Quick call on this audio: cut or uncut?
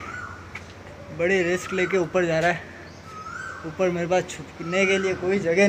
uncut